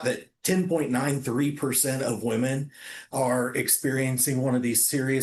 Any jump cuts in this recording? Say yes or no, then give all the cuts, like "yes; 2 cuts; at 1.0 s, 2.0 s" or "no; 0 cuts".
no; 0 cuts